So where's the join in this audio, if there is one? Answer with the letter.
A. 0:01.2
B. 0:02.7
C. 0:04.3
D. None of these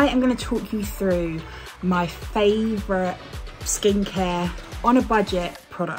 D